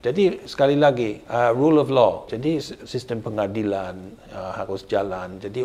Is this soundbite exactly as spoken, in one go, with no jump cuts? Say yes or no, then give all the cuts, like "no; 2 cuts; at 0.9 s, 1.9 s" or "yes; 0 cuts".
no; 2 cuts; at 1.2 s, 2.3 s